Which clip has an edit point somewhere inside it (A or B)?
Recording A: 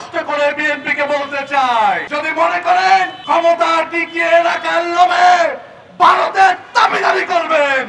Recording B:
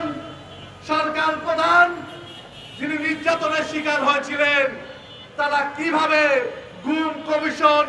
A